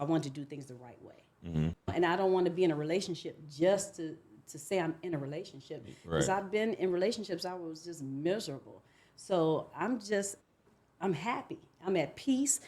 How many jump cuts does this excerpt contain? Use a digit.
1